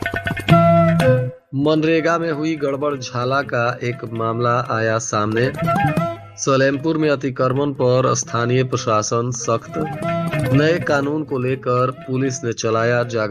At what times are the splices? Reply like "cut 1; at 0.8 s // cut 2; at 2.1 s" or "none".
cut 1; at 1.4 s